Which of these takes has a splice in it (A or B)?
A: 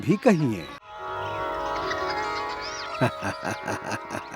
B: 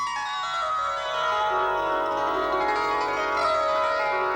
A